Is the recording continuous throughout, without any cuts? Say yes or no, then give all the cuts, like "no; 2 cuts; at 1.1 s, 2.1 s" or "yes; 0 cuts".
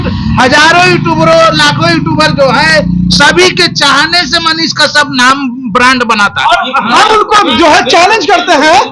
yes; 0 cuts